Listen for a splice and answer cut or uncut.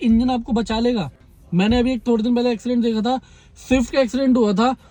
uncut